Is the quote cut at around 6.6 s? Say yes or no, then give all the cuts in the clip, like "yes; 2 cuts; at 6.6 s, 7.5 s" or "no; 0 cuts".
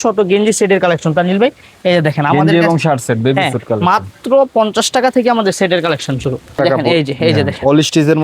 yes; 1 cut; at 6.6 s